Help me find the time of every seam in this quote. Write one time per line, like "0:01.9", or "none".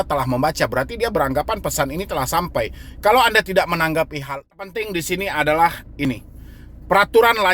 0:04.7